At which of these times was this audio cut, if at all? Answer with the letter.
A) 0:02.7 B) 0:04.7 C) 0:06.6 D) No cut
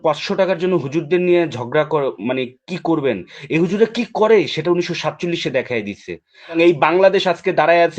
C